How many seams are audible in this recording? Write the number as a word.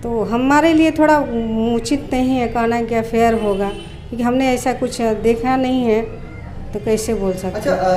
zero